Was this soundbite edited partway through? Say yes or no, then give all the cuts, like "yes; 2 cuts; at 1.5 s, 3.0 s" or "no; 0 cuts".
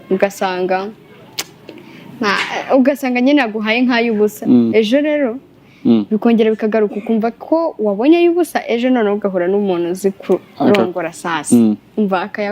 no; 0 cuts